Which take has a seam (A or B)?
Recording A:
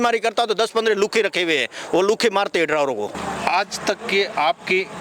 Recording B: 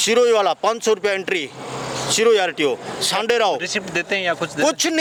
A